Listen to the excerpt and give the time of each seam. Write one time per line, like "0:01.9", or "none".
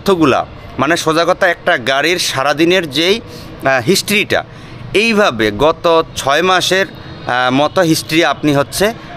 none